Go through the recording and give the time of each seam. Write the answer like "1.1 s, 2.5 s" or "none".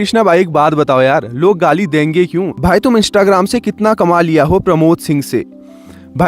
2.5 s